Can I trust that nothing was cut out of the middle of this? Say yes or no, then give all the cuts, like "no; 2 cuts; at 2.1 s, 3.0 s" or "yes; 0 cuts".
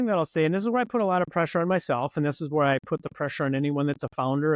yes; 0 cuts